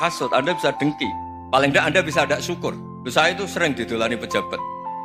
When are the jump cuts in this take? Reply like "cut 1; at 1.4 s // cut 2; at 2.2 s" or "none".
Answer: cut 1; at 3.0 s